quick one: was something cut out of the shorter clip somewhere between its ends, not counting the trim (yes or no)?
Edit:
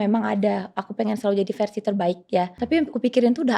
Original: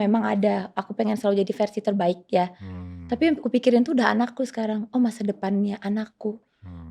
yes